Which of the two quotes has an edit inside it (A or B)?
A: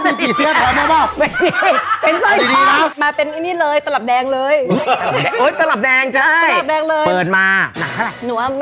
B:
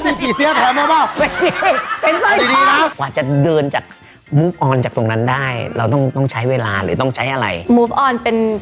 B